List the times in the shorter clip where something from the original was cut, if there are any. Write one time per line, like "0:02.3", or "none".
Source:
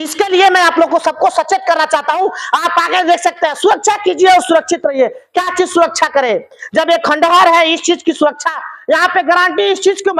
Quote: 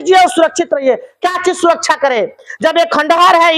none